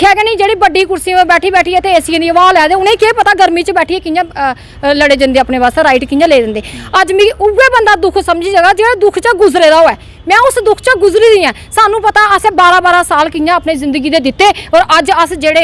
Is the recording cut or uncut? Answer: uncut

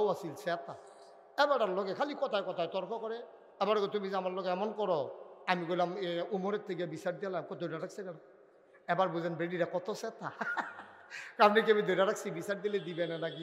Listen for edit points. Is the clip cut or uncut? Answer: uncut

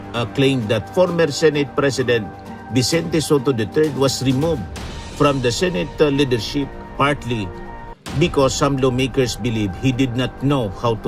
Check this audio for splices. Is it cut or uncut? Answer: uncut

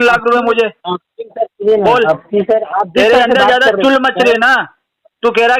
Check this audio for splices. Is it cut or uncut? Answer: uncut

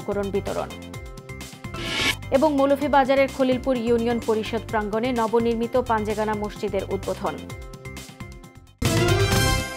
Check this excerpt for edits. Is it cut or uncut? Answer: cut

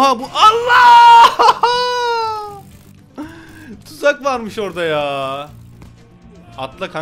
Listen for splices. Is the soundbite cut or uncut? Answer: uncut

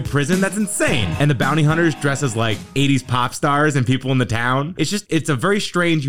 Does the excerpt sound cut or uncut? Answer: uncut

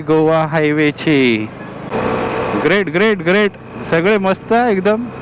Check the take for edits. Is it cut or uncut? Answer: cut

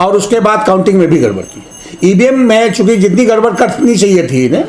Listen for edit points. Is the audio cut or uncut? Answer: uncut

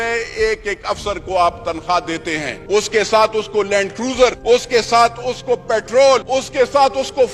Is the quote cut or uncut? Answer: cut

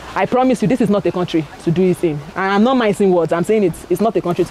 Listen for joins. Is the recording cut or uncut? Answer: uncut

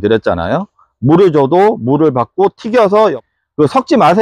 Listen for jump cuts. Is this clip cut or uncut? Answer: cut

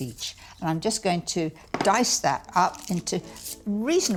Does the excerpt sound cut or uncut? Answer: uncut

